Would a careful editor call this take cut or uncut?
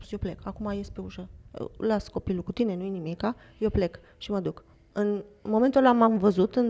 uncut